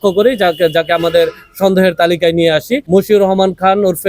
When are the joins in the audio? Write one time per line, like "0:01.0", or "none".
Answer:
0:02.8